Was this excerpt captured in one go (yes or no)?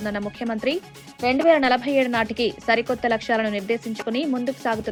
yes